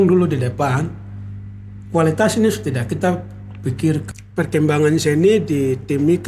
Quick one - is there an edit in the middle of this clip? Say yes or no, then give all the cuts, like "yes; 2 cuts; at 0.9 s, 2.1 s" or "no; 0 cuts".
yes; 1 cut; at 4.1 s